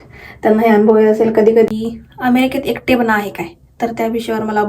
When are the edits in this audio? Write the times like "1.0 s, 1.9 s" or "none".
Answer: 1.7 s

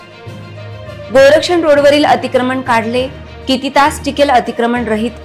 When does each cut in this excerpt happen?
1.1 s

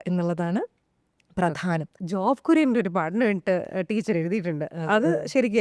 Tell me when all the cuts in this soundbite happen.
2.0 s

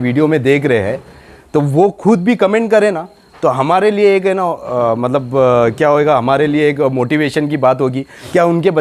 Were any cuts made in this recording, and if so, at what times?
none

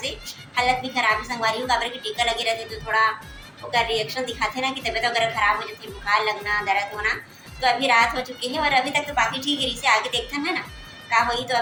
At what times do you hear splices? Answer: none

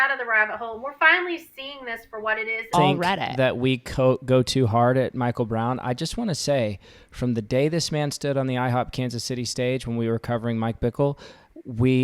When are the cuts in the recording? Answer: 2.7 s

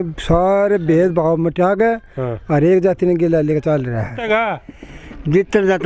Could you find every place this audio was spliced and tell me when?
4.2 s

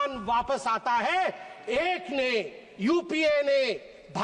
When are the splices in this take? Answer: none

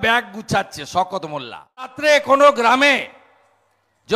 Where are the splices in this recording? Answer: 2.0 s

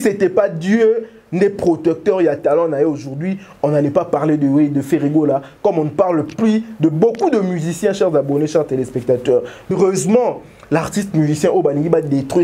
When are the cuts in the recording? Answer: 9.7 s

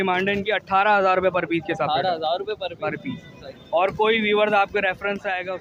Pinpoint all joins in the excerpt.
none

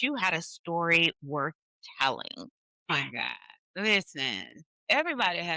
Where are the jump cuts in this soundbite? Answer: none

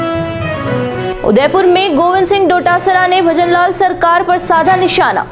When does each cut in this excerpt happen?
1.0 s

